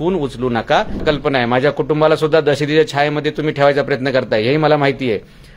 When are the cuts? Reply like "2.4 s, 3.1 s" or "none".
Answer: 1.0 s